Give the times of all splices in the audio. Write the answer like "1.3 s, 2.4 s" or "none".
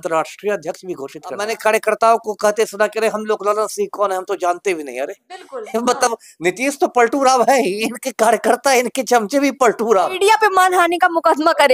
1.5 s, 10.1 s